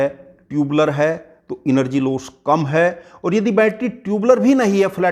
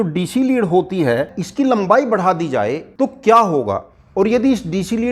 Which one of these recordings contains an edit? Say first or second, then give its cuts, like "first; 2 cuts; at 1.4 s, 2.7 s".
second; 3 cuts; at 1.4 s, 2.8 s, 3.9 s